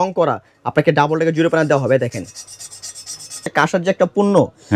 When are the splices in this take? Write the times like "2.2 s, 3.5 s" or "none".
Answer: 3.4 s

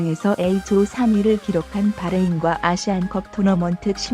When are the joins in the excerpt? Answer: none

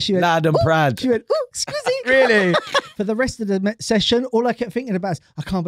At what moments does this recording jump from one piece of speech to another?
2.9 s

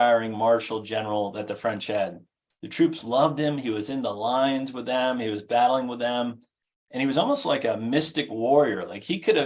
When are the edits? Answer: none

